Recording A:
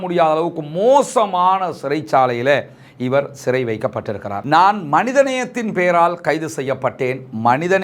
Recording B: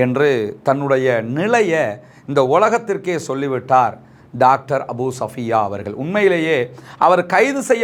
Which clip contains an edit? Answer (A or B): A